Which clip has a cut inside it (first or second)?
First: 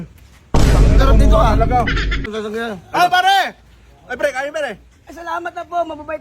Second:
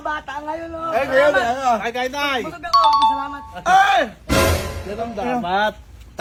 first